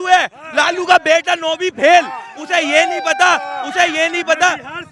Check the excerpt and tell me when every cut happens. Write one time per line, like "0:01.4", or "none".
none